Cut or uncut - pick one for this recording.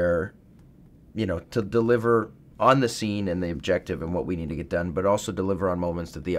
uncut